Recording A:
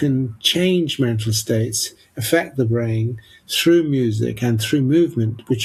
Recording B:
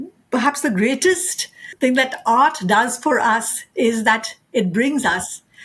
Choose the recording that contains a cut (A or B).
B